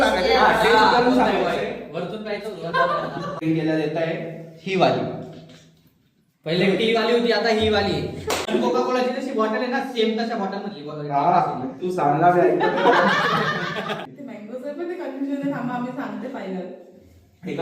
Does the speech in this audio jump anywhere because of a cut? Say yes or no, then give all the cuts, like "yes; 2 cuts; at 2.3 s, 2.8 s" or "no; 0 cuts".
yes; 3 cuts; at 3.4 s, 8.4 s, 14.0 s